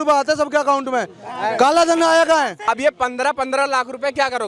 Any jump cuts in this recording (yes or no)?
no